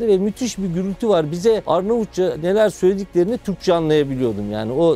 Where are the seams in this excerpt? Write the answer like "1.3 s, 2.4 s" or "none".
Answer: 1.6 s

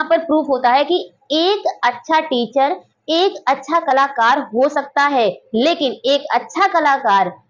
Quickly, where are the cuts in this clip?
none

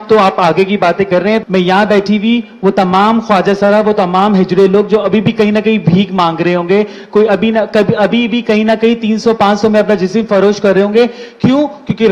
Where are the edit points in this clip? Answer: 1.4 s

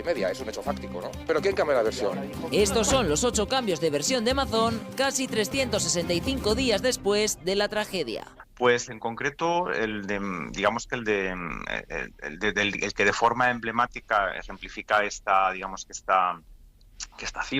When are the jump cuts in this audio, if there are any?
8.4 s

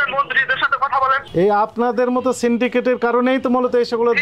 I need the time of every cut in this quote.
1.3 s

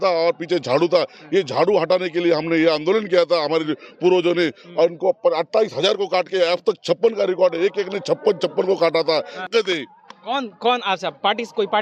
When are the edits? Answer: 9.4 s

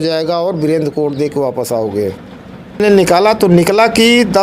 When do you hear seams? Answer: 2.8 s

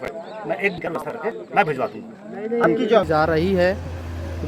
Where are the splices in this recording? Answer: 3.1 s

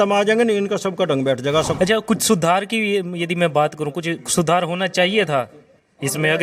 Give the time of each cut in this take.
1.7 s

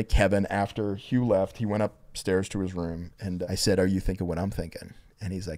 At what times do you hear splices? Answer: 3.4 s

